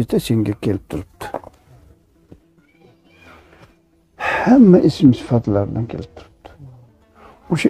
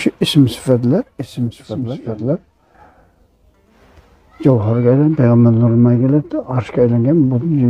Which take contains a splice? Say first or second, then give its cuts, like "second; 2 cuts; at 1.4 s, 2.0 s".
second; 1 cut; at 1.9 s